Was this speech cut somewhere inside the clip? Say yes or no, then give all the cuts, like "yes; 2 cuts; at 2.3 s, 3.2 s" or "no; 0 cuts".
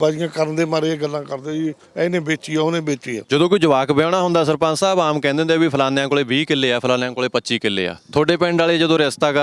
yes; 1 cut; at 3.2 s